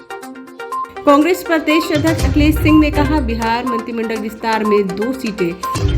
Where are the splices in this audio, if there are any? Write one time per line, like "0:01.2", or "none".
0:00.9